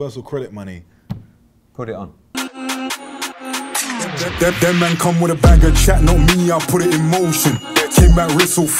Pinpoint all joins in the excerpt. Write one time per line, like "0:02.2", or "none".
0:02.2

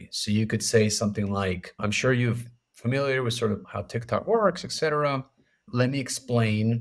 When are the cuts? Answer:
0:01.8
0:03.7
0:05.7

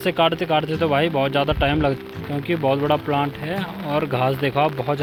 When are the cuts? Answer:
none

